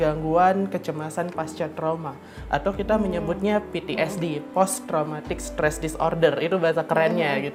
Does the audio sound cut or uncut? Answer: uncut